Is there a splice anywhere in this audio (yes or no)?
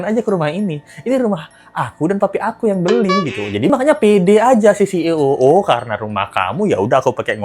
yes